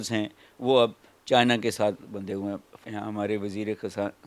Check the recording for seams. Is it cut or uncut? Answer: cut